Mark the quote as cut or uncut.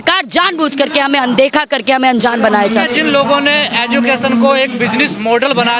uncut